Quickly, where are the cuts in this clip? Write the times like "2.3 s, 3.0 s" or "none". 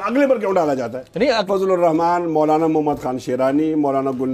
1.5 s